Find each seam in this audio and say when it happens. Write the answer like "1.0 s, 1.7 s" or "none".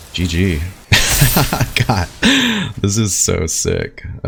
none